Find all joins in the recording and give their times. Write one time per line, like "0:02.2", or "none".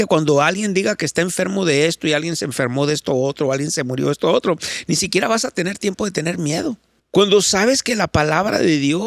0:06.9